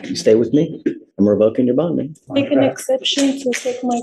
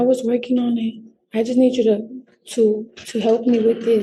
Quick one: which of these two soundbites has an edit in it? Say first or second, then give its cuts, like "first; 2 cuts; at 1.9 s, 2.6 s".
first; 2 cuts; at 1.0 s, 2.2 s